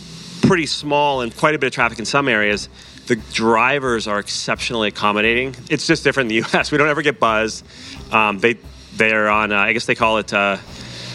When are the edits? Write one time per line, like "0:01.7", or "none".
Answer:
0:01.3
0:05.5

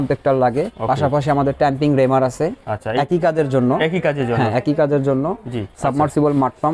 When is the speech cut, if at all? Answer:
0:05.7

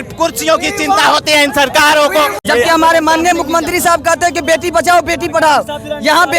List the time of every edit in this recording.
0:02.4

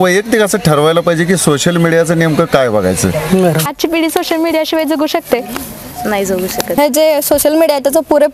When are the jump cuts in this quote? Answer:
0:03.6
0:06.8

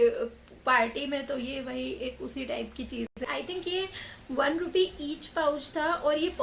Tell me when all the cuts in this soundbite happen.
0:03.1

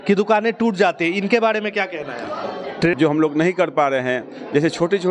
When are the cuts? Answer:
0:03.0

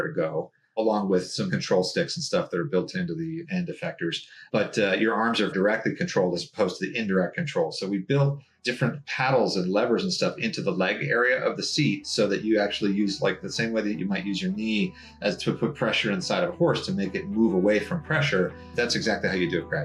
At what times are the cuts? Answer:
0:18.7

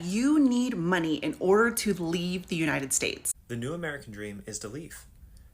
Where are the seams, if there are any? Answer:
0:03.5

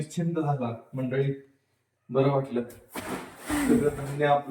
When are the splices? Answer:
none

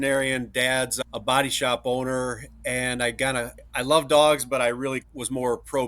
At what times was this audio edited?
0:00.9
0:03.6
0:05.1

